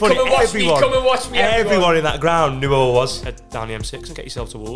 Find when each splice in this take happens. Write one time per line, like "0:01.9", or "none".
0:03.2